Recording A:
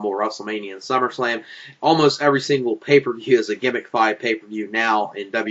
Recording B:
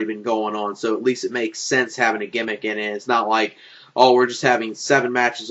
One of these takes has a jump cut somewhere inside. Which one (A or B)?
A